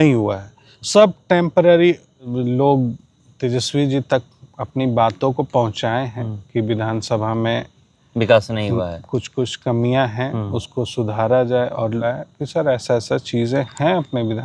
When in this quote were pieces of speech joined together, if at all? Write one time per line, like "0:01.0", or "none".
0:02.3
0:12.0